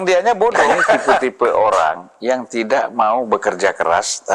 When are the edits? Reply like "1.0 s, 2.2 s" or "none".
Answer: 1.2 s